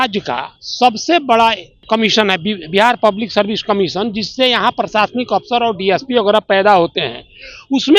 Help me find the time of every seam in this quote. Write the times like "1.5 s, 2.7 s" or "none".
1.8 s